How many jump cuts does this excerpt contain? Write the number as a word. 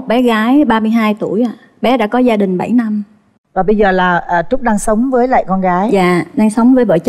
zero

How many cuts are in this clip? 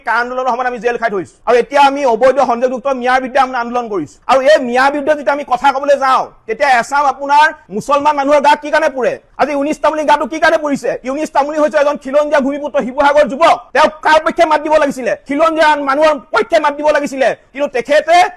two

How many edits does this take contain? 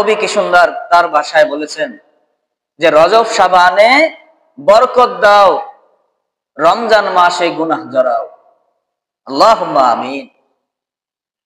zero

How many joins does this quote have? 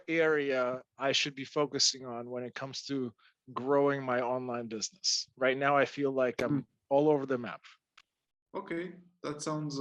zero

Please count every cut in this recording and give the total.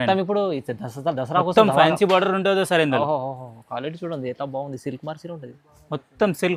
zero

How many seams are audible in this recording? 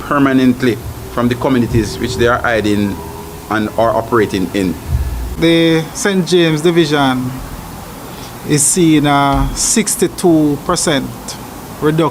one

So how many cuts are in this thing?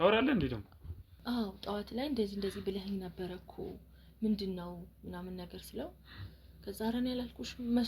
one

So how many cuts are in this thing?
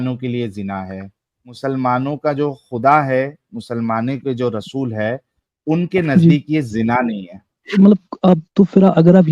two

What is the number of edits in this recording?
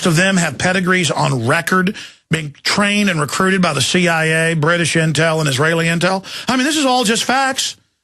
one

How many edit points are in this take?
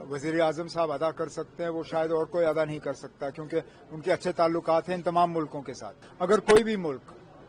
one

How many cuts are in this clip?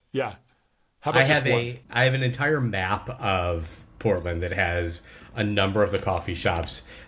one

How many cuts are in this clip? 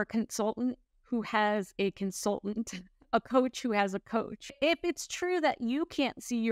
one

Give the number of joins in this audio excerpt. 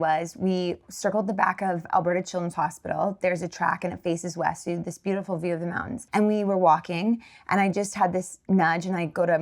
one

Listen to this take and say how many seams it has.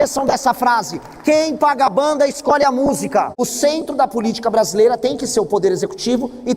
one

